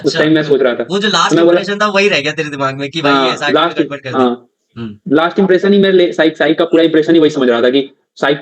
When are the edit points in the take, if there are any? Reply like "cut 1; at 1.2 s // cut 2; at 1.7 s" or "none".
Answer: none